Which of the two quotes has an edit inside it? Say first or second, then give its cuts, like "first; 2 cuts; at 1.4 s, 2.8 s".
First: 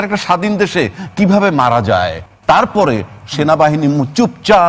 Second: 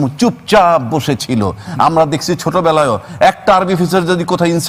first; 1 cut; at 2.3 s